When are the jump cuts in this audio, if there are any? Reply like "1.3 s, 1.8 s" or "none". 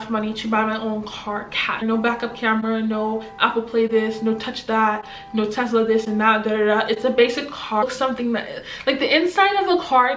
1.8 s, 7.8 s